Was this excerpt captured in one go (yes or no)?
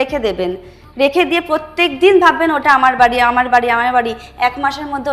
yes